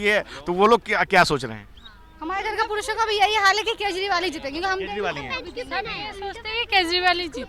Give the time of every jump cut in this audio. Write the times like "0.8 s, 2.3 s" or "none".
none